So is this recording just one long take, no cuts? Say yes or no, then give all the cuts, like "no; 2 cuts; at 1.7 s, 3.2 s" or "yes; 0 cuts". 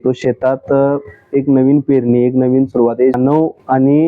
no; 1 cut; at 3.2 s